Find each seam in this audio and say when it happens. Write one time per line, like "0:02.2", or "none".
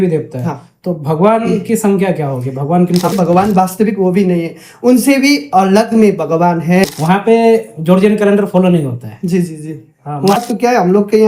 0:03.1
0:06.9
0:10.4